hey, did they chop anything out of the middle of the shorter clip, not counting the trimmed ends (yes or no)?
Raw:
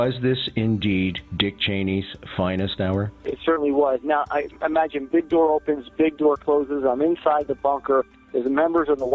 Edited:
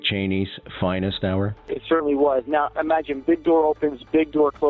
yes